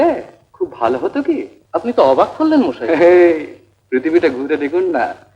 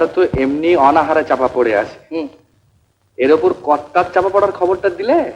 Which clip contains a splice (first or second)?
first